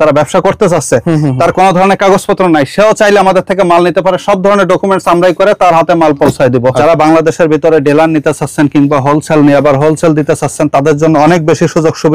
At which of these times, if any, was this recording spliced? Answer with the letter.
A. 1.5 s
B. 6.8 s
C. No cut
B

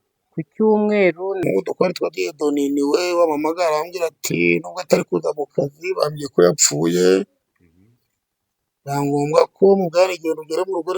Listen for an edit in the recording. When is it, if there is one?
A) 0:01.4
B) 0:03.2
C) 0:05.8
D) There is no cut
A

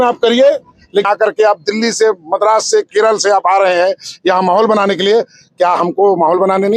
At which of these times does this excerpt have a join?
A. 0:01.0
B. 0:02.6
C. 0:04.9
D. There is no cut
A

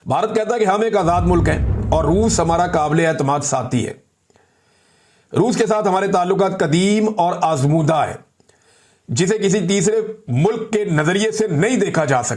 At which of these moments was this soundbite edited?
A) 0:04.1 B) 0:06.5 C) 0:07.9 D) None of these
D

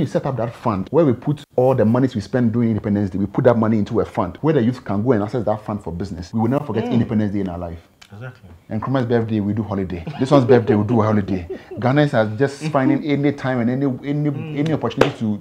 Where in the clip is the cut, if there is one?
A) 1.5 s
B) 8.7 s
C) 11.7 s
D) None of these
B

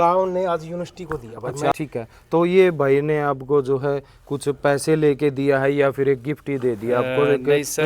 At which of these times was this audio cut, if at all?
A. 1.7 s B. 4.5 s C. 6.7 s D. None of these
A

